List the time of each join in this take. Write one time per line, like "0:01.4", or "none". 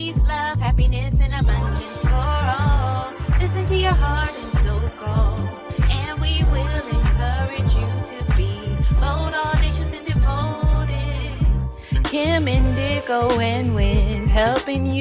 none